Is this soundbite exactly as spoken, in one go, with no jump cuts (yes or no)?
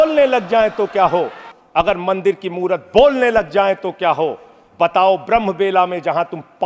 yes